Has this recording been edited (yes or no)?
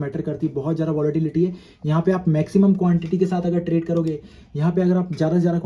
no